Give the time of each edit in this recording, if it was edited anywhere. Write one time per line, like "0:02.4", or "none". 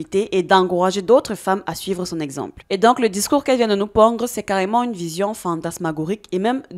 0:02.5